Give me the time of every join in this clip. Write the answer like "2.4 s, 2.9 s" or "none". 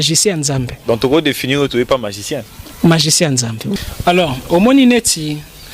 3.8 s